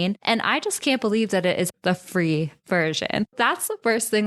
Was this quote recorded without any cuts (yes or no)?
no